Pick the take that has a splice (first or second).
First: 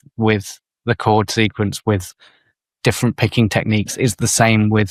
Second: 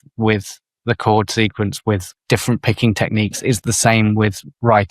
second